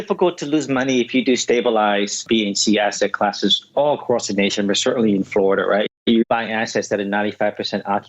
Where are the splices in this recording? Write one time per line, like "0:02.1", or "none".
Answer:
0:02.2
0:05.9